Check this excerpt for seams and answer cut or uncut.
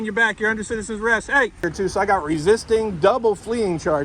cut